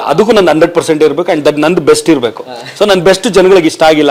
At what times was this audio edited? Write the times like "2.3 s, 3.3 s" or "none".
none